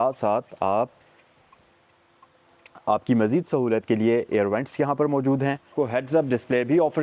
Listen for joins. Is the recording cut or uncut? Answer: cut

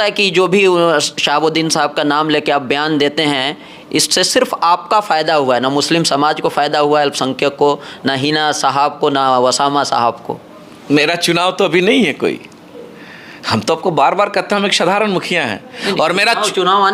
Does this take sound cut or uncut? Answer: uncut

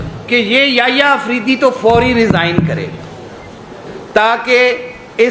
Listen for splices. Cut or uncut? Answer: cut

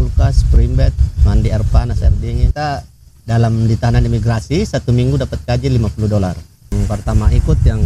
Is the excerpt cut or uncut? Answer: cut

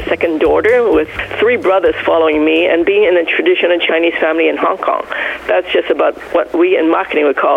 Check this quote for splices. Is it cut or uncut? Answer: uncut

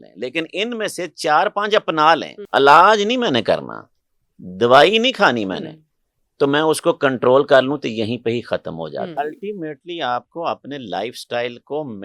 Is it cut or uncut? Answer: cut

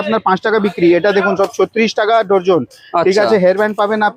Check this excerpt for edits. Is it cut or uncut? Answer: uncut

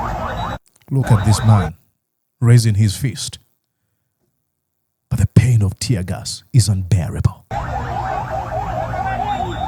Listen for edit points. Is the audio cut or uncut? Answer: uncut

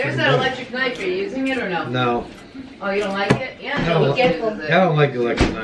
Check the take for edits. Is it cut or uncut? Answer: uncut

